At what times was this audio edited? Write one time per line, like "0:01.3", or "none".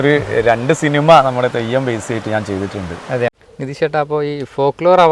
0:03.4